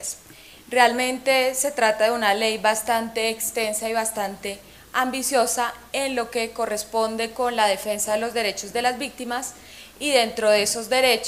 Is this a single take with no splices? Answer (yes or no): no